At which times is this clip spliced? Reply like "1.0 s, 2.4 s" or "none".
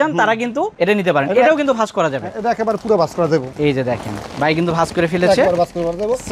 none